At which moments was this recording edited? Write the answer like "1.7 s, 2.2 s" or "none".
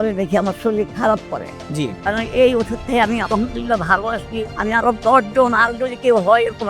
2.0 s

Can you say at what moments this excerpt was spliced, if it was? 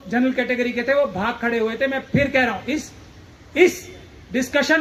none

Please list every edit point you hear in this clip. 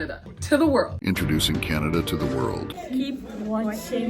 1.0 s, 2.7 s

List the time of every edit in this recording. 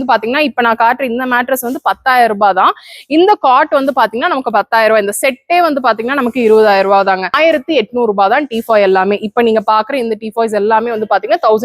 7.4 s

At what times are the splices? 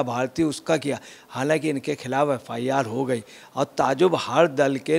1.1 s

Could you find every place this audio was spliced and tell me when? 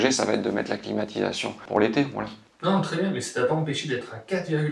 1.6 s

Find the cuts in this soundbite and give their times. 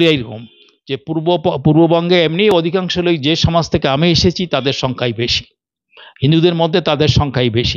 none

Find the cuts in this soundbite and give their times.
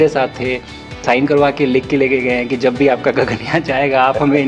1.0 s

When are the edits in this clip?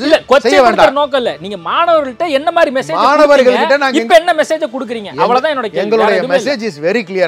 none

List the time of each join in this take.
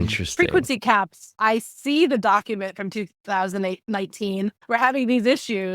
1.3 s, 4.6 s

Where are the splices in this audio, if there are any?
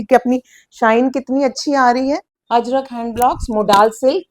2.4 s

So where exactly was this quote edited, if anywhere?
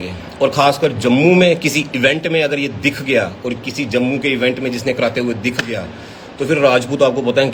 none

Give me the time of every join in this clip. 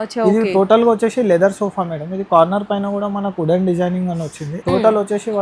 4.5 s

